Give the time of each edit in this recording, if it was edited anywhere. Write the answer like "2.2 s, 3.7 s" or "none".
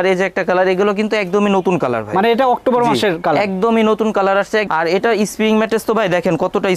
4.7 s